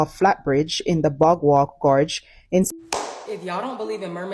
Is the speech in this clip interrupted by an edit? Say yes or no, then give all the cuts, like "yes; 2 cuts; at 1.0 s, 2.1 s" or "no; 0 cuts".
yes; 1 cut; at 2.7 s